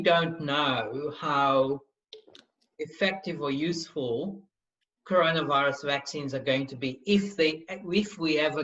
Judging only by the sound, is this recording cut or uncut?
uncut